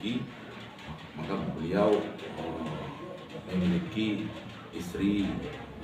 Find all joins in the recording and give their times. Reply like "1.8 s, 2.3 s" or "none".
none

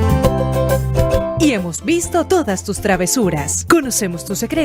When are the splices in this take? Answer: none

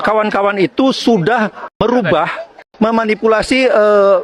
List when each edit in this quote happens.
1.8 s, 2.6 s

